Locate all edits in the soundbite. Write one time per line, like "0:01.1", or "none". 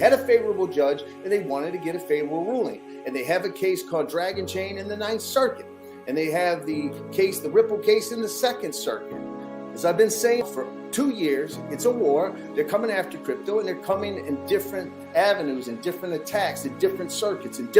0:10.4